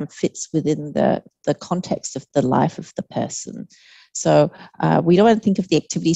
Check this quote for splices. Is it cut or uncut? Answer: uncut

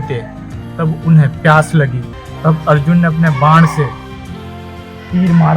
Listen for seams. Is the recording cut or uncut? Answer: cut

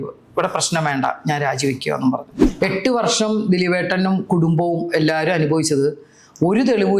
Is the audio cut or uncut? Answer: cut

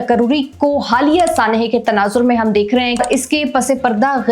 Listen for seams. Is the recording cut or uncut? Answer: cut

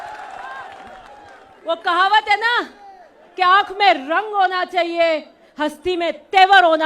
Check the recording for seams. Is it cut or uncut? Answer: uncut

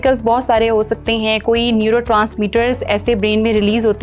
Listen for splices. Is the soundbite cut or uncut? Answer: uncut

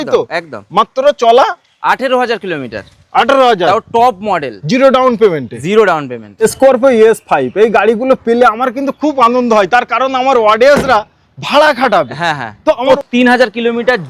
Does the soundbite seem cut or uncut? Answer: cut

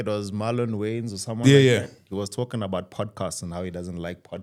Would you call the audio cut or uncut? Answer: uncut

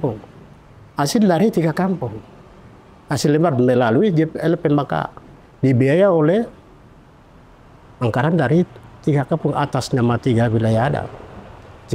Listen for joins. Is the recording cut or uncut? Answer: uncut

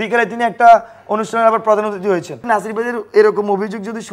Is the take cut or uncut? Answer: cut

